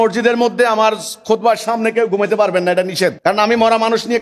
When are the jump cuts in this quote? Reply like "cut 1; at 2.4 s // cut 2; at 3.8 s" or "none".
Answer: cut 1; at 3.2 s